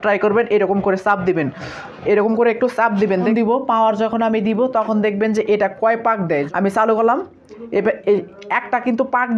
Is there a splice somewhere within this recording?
yes; 2 cuts; at 3.2 s, 6.5 s

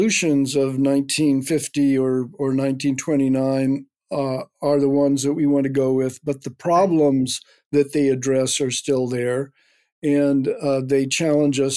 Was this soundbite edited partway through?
no; 0 cuts

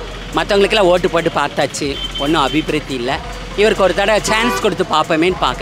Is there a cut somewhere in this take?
no; 0 cuts

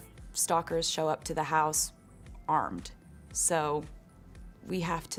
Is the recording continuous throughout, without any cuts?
yes; 0 cuts

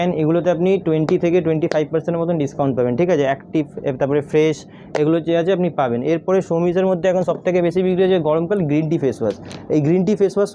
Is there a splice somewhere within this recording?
no; 0 cuts

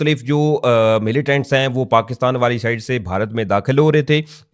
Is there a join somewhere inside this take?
no; 0 cuts

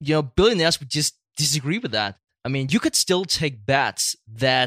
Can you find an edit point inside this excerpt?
yes; 1 cut; at 2.2 s

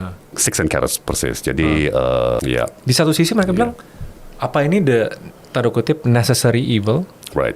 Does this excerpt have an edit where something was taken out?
yes; 1 cut; at 2.4 s

